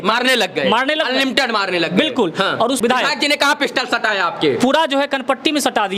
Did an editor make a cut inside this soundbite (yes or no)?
yes